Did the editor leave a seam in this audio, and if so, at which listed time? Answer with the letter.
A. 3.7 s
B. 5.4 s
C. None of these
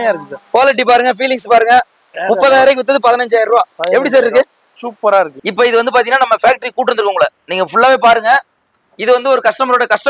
B